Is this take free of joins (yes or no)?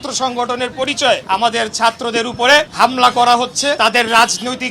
no